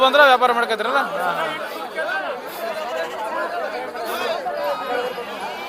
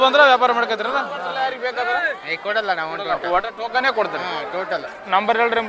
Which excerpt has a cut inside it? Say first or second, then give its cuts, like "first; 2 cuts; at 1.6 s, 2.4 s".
second; 1 cut; at 1.3 s